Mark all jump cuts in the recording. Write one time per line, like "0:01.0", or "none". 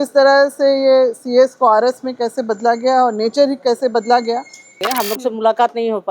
0:04.8

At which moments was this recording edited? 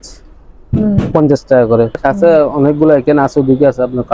0:02.0

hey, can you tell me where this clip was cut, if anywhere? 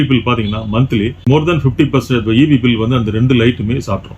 0:01.2

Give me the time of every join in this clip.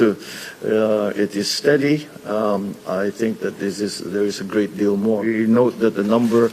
0:05.3

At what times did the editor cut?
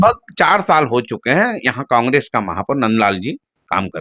none

